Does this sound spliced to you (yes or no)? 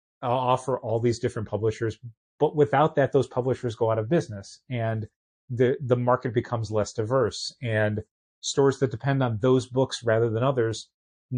no